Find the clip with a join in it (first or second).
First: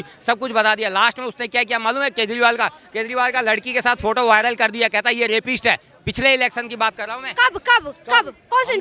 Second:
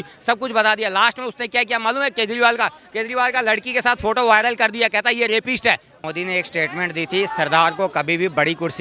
second